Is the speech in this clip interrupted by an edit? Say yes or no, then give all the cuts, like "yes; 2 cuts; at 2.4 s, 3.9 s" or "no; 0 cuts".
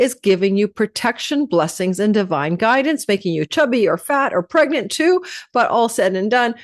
no; 0 cuts